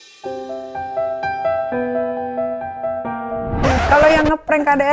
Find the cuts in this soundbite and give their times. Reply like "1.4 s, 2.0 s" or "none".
3.7 s